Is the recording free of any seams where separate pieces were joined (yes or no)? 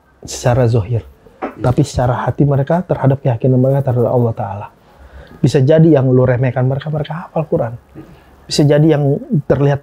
yes